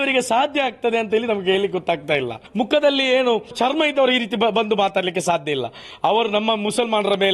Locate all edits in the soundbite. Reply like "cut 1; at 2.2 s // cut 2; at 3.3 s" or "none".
cut 1; at 2.4 s // cut 2; at 3.5 s